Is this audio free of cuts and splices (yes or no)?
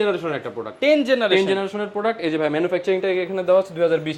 yes